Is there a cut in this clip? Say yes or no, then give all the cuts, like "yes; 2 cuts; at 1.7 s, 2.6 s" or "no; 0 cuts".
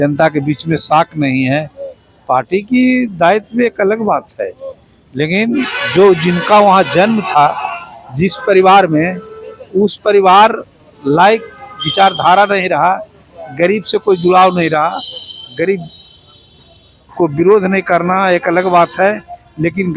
no; 0 cuts